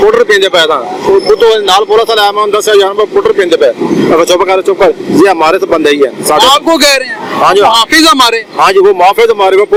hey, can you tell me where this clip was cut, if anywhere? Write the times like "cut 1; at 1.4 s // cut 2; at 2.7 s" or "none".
none